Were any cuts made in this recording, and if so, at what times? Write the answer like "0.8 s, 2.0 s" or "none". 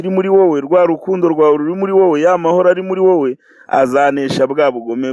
none